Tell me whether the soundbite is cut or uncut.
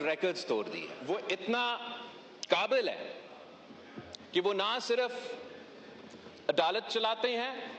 cut